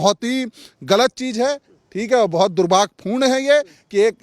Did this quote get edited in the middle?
no; 0 cuts

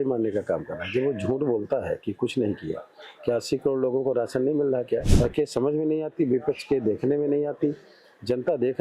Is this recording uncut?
no; 1 cut; at 5.1 s

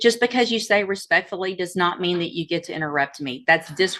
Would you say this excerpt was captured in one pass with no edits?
yes; 0 cuts

